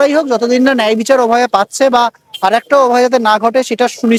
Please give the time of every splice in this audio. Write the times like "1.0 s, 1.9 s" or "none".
none